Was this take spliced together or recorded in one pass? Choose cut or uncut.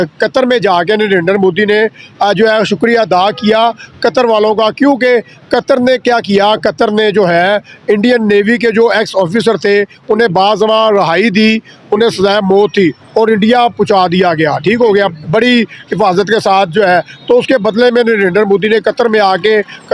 uncut